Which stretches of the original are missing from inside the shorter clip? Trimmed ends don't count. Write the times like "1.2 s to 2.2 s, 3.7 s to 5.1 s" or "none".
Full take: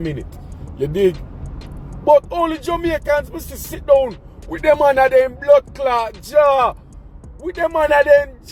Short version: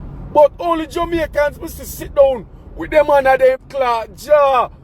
5.4 s to 5.7 s

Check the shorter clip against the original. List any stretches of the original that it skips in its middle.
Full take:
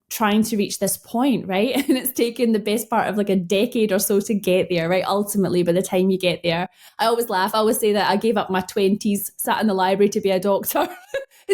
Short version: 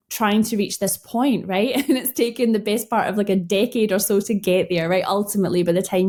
none

